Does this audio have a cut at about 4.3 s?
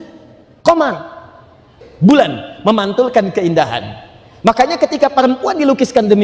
no; 1 cut; at 1.8 s

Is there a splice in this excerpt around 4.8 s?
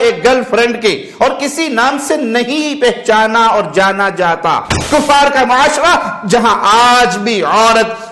yes; 1 cut; at 4.8 s

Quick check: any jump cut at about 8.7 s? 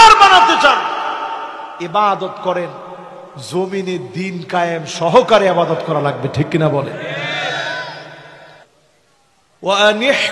yes; 1 cut; at 8.7 s

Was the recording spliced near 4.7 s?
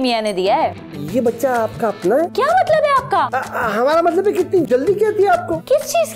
no; 2 cuts; at 0.7 s, 2.3 s

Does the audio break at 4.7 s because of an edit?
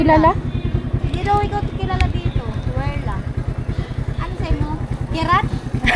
no; 0 cuts

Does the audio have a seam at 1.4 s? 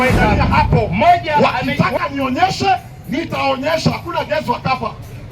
yes; 1 cut; at 1.4 s

